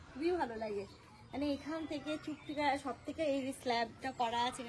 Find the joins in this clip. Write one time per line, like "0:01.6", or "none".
none